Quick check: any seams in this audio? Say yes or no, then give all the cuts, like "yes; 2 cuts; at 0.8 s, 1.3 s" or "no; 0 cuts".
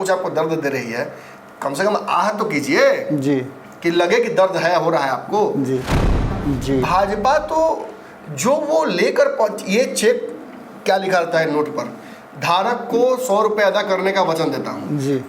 yes; 1 cut; at 6.0 s